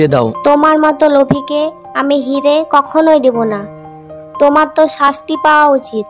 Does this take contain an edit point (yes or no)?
no